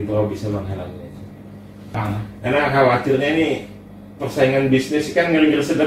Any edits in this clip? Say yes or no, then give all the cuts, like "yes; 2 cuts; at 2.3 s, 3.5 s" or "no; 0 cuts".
yes; 1 cut; at 1.9 s